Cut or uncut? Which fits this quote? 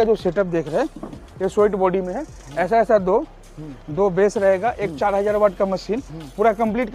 uncut